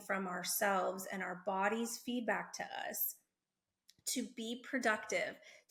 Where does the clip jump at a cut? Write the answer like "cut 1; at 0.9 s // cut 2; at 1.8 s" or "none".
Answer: none